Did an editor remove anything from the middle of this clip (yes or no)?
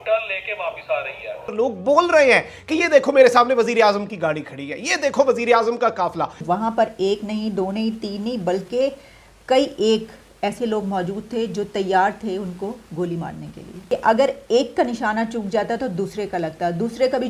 yes